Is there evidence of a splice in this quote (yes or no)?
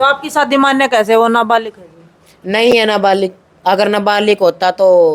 no